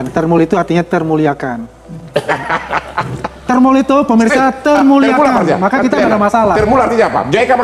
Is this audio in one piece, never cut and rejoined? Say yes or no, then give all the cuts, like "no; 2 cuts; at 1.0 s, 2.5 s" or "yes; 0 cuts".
yes; 0 cuts